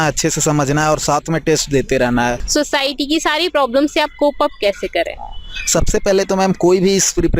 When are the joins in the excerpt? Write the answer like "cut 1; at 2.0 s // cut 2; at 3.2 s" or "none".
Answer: cut 1; at 2.4 s